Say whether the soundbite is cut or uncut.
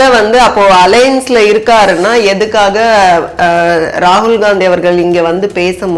uncut